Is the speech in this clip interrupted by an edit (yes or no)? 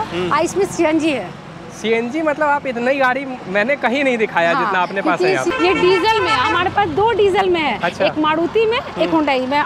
yes